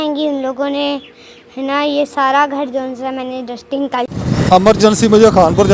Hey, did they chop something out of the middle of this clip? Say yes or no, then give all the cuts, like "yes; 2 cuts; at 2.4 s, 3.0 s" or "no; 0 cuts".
yes; 1 cut; at 4.1 s